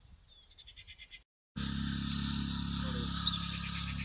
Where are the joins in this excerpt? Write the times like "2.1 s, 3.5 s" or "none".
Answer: 1.4 s